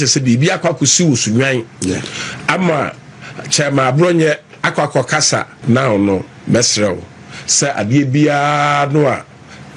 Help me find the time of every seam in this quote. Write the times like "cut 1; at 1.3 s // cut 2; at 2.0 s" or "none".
cut 1; at 5.5 s